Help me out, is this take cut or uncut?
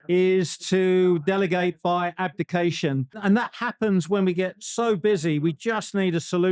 uncut